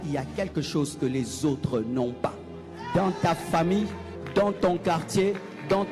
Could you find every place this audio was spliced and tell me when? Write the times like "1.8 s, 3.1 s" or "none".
none